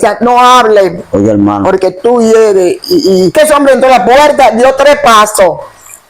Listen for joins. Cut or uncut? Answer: cut